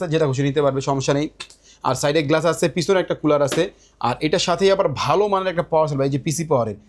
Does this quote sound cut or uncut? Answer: uncut